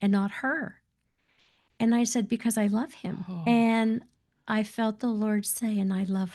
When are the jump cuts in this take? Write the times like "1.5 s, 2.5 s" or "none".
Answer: none